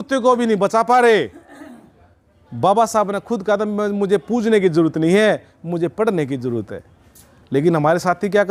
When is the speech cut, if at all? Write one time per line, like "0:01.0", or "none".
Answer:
none